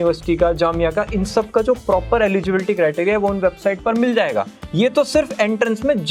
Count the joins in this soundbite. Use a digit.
0